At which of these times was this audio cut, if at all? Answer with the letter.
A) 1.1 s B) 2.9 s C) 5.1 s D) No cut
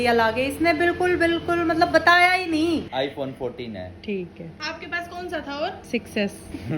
B